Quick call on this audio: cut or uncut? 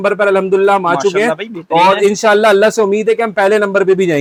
uncut